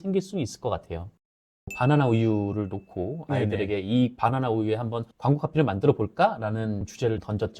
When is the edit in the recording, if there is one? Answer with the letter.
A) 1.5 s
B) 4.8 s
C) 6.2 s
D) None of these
A